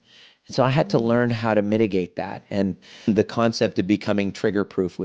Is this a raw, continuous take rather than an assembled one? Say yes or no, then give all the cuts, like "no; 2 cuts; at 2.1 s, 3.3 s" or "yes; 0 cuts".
no; 1 cut; at 3.1 s